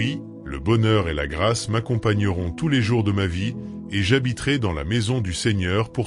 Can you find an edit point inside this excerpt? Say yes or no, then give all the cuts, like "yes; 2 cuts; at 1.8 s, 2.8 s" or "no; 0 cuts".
no; 0 cuts